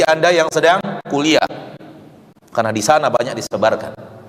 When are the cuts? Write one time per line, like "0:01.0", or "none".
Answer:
none